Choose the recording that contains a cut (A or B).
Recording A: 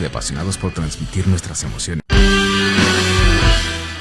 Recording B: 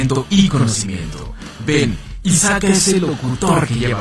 A